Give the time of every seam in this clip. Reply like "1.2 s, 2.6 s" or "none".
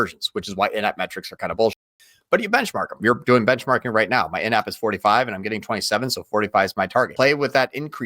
3.0 s, 7.1 s